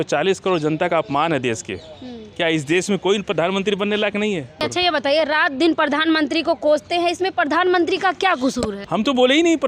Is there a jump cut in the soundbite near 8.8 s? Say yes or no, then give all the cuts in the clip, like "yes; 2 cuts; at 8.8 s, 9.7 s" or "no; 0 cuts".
yes; 2 cuts; at 4.6 s, 8.8 s